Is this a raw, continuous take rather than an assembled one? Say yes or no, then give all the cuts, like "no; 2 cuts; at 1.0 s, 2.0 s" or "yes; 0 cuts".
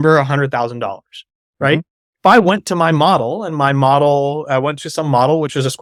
yes; 0 cuts